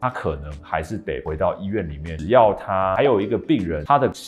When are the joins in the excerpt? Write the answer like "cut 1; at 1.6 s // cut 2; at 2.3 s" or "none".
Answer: cut 1; at 2.1 s